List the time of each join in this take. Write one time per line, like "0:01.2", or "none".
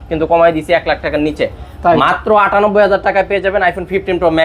none

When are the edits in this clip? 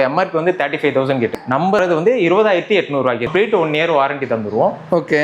0:01.7
0:03.3

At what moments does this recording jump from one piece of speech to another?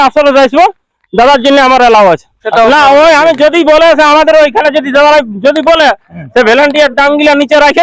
0:02.5

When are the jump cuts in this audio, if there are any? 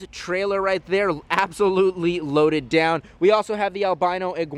none

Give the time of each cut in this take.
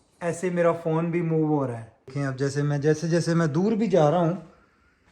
0:02.1

